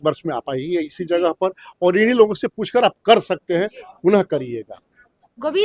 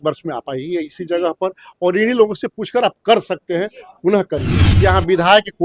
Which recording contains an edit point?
second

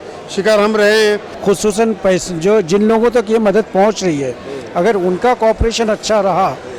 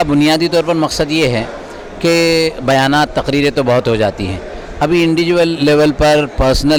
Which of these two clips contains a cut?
first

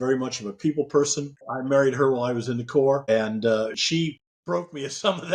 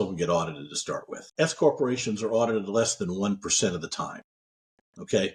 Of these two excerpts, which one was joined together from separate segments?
first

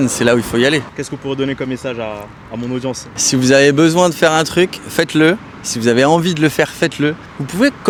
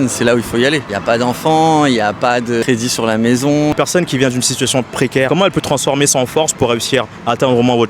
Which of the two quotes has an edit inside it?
second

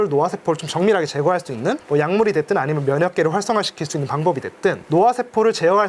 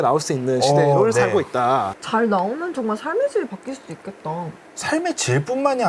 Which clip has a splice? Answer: second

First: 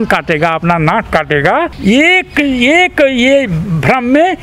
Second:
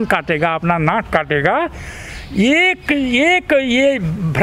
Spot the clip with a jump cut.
first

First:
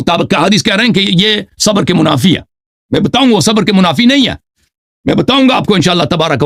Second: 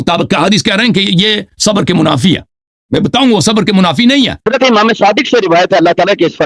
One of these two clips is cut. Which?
second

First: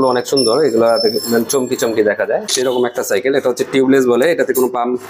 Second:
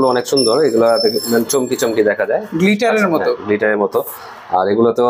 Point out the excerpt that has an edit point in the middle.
first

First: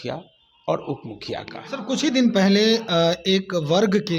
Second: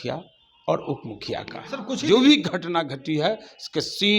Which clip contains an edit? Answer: second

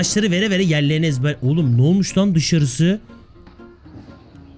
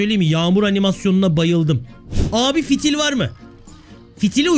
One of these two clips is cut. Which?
second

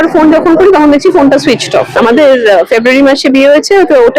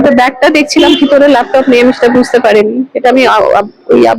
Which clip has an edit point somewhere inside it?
first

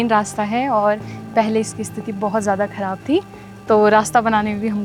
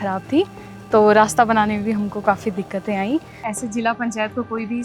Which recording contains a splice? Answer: second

